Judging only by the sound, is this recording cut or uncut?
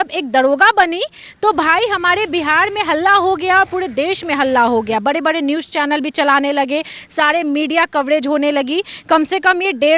uncut